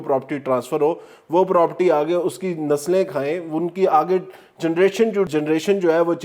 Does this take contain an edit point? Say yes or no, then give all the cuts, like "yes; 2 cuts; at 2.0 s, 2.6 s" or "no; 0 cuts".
yes; 1 cut; at 5.3 s